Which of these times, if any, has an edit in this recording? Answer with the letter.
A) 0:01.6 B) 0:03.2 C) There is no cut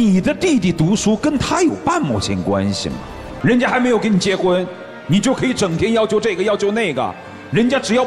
B